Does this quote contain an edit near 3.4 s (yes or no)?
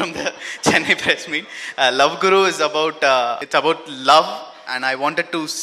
yes